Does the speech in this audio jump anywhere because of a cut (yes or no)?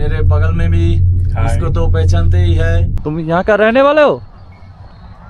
yes